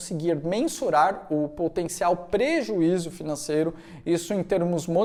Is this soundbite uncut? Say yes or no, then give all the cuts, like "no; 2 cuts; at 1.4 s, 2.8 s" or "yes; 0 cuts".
yes; 0 cuts